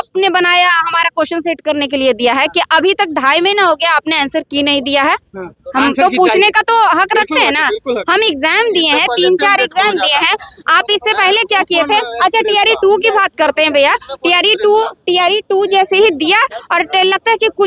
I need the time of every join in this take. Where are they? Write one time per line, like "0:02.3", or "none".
none